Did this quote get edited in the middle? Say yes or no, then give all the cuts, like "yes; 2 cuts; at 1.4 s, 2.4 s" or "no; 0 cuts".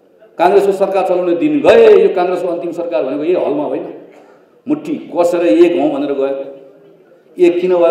no; 0 cuts